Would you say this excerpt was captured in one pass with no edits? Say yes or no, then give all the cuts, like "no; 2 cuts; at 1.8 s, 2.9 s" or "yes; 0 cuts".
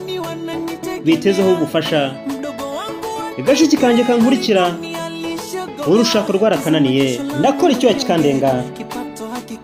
no; 1 cut; at 7.3 s